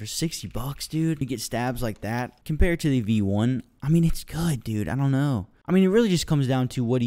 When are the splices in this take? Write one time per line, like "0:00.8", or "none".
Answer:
0:01.2
0:02.4